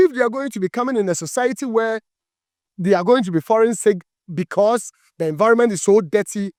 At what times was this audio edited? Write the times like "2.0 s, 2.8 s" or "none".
none

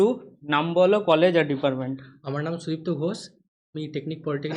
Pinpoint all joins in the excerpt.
none

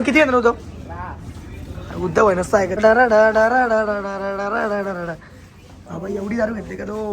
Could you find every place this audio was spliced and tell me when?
2.7 s

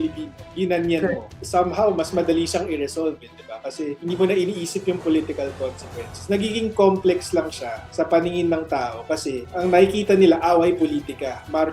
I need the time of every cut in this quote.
1.3 s, 4.0 s

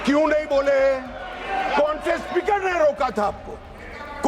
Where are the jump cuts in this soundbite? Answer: none

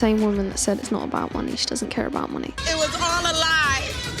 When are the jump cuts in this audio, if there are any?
none

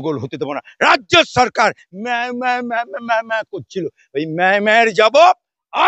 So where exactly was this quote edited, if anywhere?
none

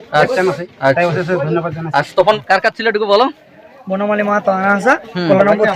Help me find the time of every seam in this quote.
2.4 s

